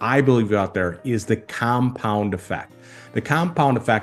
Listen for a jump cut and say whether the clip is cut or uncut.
uncut